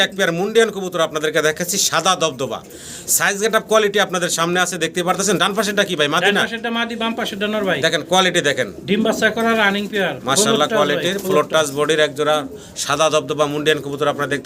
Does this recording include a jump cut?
no; 0 cuts

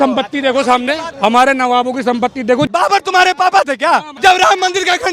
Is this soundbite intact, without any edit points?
no; 3 cuts; at 1.1 s, 2.7 s, 4.1 s

